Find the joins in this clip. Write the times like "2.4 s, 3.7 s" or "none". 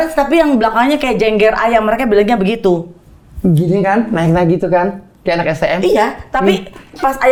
none